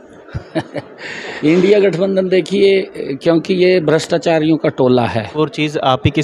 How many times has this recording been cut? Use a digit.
2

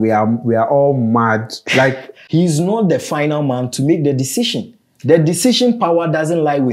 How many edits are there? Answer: 1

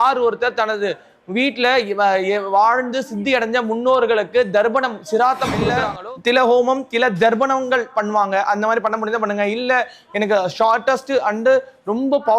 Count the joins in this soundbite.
1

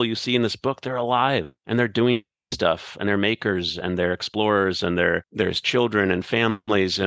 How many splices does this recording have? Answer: 2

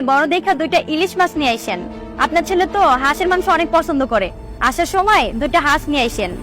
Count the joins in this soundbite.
1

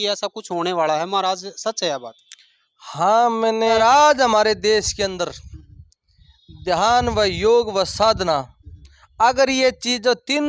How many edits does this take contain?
1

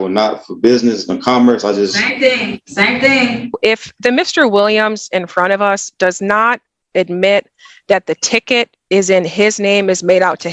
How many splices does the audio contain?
1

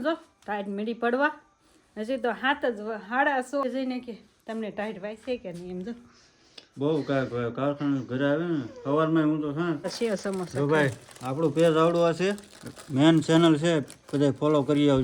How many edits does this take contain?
2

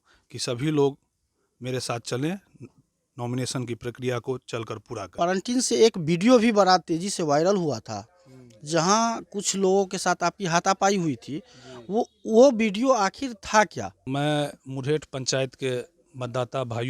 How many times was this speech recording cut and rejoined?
2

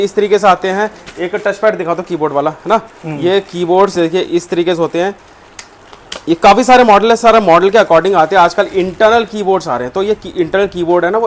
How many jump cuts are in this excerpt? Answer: 0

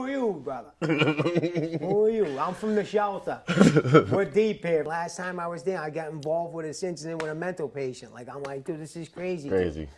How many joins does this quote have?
1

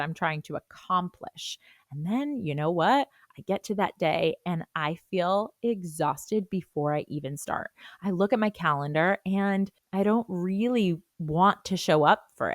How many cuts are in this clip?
2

